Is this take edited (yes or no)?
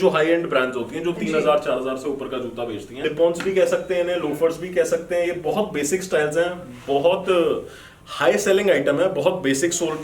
yes